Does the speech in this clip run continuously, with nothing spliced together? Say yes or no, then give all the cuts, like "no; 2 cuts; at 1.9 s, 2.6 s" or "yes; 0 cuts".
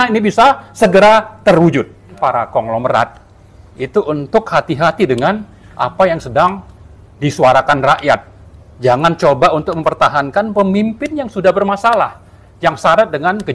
no; 1 cut; at 2.1 s